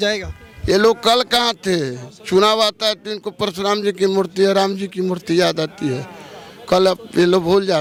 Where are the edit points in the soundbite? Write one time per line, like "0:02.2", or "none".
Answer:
none